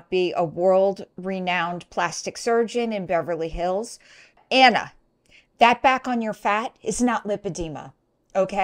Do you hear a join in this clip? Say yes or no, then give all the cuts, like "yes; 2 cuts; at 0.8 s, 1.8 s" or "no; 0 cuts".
yes; 1 cut; at 4.4 s